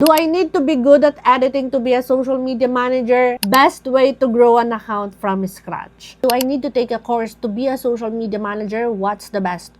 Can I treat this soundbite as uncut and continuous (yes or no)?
no